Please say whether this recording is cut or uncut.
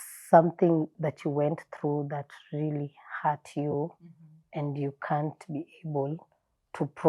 uncut